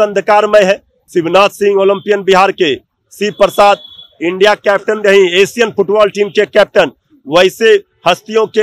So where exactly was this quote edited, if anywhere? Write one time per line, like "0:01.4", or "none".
0:00.9